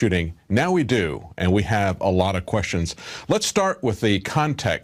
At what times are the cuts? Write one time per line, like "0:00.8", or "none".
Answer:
none